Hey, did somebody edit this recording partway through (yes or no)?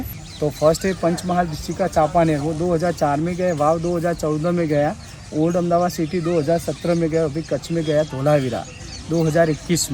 no